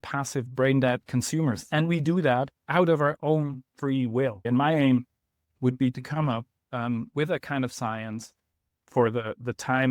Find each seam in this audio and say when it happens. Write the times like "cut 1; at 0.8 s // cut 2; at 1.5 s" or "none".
cut 1; at 1.0 s // cut 2; at 4.4 s